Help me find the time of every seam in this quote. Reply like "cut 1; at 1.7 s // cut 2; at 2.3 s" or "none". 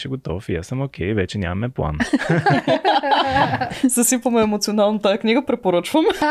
cut 1; at 3.7 s